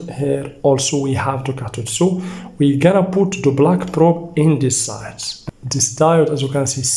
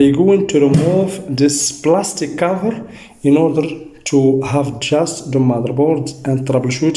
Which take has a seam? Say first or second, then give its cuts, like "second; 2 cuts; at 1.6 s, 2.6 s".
first; 1 cut; at 5.3 s